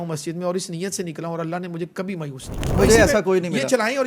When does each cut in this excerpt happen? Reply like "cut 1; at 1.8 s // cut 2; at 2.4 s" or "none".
cut 1; at 2.8 s